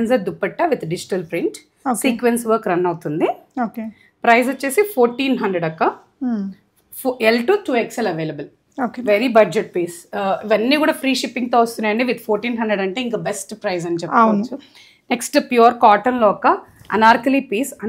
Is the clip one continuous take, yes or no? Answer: yes